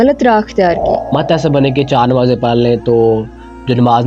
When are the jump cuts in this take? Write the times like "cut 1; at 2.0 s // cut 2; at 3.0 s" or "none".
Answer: cut 1; at 1.1 s